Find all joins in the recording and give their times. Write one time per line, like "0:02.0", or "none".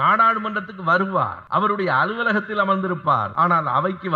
0:01.4
0:03.3